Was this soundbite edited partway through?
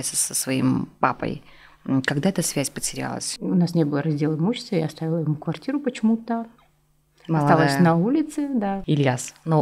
yes; 2 cuts; at 3.3 s, 8.8 s

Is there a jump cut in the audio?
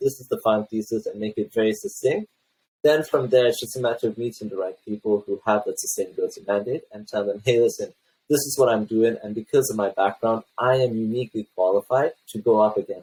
no; 0 cuts

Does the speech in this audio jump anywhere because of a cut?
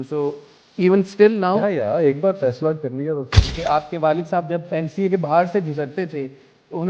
yes; 1 cut; at 3.5 s

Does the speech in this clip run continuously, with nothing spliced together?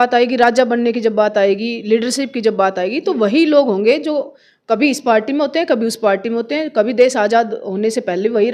yes; 0 cuts

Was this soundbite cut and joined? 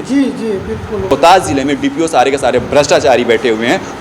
yes; 1 cut; at 1.1 s

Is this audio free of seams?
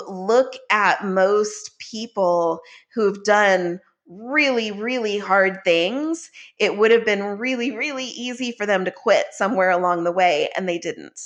yes; 0 cuts

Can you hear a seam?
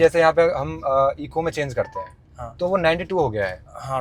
no; 0 cuts

